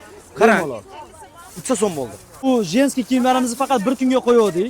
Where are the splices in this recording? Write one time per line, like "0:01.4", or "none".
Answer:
0:02.5